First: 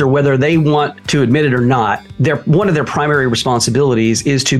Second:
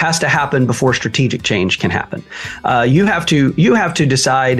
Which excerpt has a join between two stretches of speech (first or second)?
first